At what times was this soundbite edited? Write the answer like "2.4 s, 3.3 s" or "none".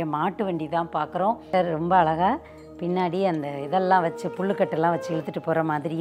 1.4 s